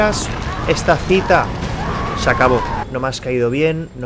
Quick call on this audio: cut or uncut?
cut